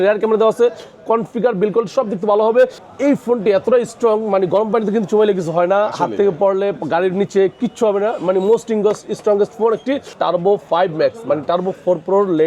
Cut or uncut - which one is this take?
cut